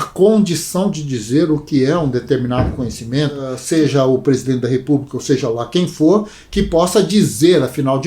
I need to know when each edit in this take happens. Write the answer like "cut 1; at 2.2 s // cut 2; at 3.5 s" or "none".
cut 1; at 3.6 s

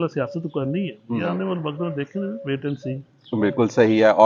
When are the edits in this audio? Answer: none

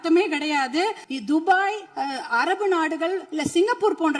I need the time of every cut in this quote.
cut 1; at 1.1 s // cut 2; at 1.9 s // cut 3; at 3.3 s

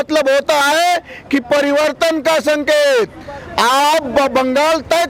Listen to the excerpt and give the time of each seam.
none

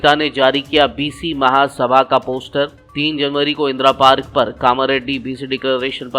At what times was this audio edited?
none

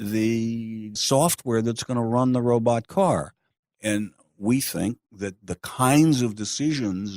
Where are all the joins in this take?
cut 1; at 0.9 s

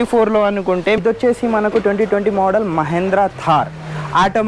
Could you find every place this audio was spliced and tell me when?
cut 1; at 1.0 s

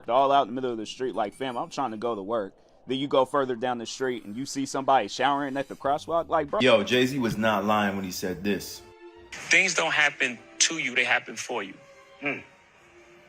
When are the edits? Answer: cut 1; at 6.6 s

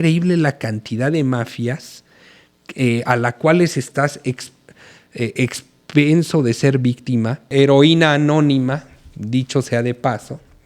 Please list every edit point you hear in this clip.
cut 1; at 7.5 s

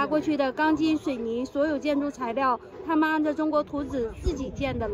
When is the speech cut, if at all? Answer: none

